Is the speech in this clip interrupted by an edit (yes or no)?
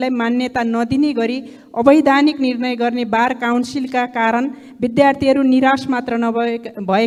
no